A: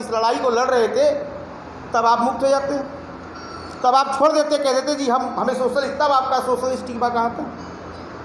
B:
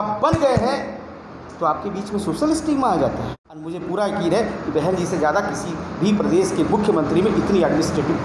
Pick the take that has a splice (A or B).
B